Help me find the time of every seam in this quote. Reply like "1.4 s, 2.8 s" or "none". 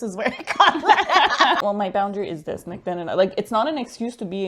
1.6 s